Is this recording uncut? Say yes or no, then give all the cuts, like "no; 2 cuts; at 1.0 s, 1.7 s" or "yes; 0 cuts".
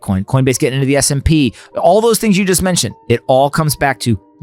no; 1 cut; at 2.9 s